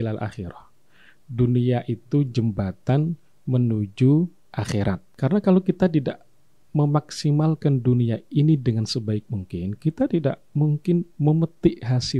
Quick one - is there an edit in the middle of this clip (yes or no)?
yes